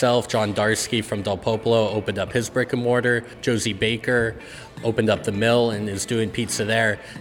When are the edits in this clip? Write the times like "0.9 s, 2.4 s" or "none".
3.3 s